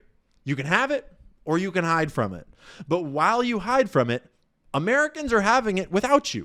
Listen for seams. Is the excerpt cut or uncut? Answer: uncut